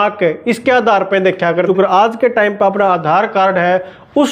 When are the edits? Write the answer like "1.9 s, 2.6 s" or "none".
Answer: 1.7 s